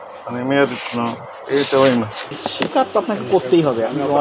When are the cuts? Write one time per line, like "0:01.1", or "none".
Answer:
0:02.3